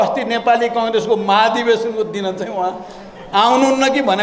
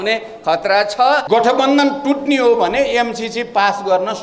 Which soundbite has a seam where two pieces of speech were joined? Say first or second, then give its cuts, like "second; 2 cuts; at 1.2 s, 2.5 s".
second; 1 cut; at 1.2 s